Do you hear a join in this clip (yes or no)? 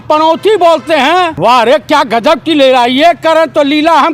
yes